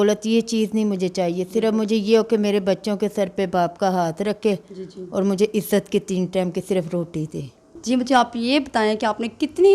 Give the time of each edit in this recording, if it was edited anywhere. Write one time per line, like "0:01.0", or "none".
0:07.7